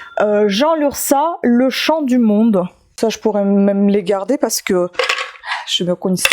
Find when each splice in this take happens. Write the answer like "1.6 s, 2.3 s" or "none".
2.8 s